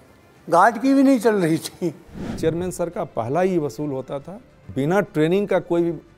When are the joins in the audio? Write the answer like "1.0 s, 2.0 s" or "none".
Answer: 2.4 s, 4.7 s